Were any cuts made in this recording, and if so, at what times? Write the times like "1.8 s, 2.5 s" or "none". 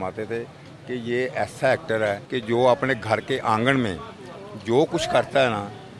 2.3 s